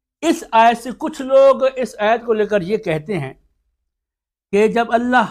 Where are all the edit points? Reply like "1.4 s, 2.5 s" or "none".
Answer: none